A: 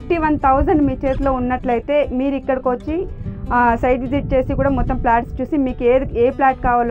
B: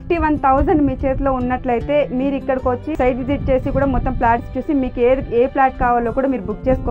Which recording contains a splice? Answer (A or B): B